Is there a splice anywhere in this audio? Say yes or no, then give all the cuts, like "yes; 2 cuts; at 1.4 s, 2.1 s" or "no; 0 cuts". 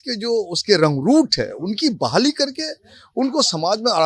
no; 0 cuts